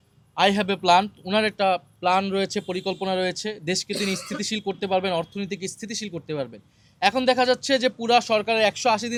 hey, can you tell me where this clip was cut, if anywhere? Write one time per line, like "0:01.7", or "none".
none